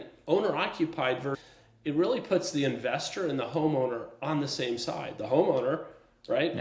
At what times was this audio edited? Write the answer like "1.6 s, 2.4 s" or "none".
1.5 s